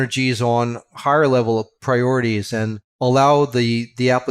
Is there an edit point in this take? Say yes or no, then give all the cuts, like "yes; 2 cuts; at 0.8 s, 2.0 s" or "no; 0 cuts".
yes; 2 cuts; at 1.7 s, 2.8 s